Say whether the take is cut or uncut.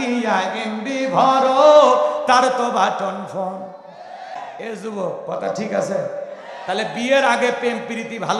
cut